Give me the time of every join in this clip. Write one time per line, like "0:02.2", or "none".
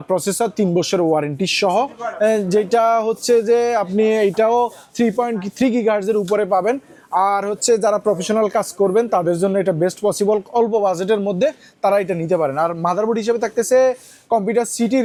none